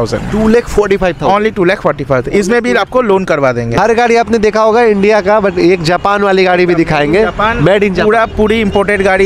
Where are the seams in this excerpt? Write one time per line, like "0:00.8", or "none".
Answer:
0:03.7